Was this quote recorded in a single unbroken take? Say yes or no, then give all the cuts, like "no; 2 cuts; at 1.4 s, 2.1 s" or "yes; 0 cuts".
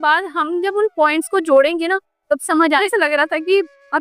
no; 1 cut; at 2.9 s